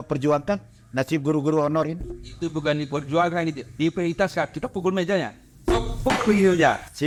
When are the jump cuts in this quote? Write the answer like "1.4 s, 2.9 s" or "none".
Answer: none